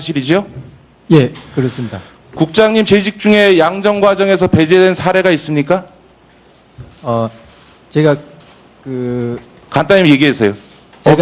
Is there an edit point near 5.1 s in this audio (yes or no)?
no